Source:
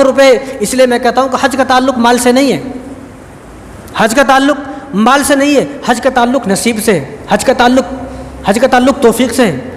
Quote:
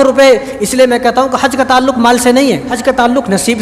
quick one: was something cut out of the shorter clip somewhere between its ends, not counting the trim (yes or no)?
yes